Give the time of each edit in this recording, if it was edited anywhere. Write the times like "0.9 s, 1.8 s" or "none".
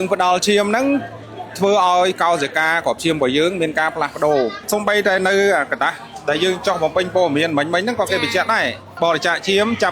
4.7 s, 8.8 s